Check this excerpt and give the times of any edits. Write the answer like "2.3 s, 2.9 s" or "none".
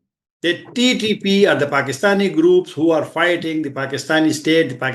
none